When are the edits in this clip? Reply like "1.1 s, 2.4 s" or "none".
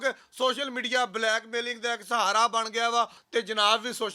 3.2 s